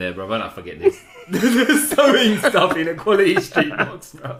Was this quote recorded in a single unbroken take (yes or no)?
yes